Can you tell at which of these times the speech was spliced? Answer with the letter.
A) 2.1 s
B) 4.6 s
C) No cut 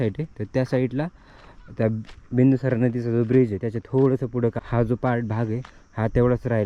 B